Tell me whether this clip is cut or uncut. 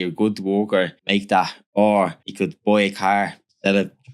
cut